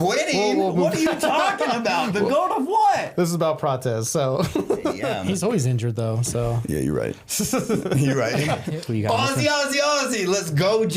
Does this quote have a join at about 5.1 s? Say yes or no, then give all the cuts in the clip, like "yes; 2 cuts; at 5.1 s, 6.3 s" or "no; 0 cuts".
yes; 2 cuts; at 5.1 s, 8.8 s